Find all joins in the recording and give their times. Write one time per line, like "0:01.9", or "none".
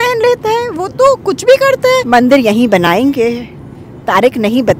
0:02.0